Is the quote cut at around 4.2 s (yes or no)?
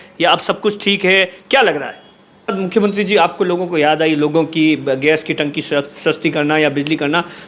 no